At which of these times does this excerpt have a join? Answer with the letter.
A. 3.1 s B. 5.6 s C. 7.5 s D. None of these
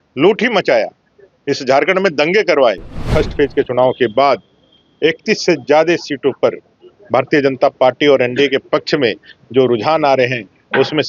A